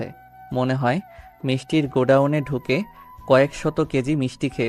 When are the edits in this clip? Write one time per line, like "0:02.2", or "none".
none